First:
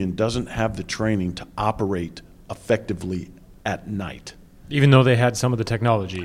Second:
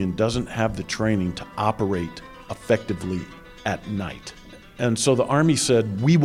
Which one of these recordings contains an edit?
second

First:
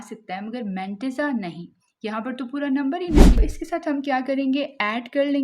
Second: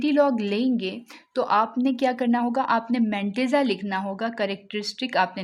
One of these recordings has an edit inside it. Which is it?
first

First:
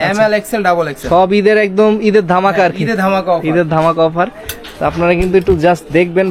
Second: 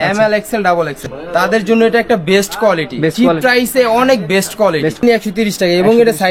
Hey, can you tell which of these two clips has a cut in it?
second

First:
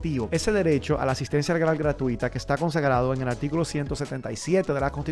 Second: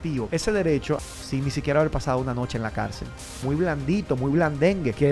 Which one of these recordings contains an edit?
second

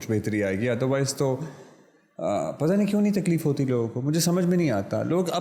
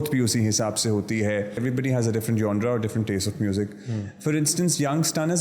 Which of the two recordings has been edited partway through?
second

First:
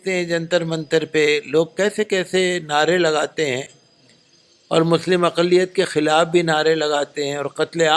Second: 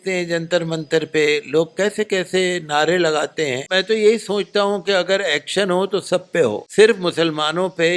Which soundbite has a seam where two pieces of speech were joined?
second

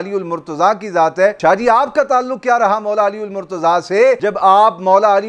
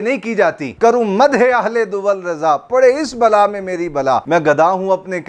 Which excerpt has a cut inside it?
first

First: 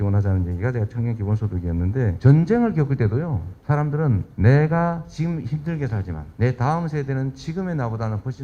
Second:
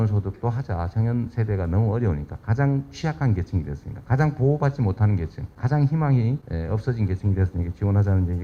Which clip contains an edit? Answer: first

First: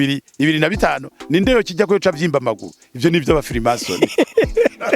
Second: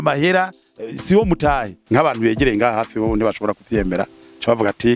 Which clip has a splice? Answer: second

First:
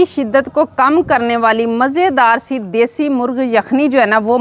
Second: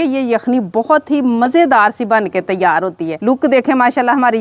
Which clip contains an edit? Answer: second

